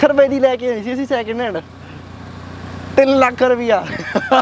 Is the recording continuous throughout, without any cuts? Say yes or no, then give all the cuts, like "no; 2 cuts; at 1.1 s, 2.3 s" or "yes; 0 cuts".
yes; 0 cuts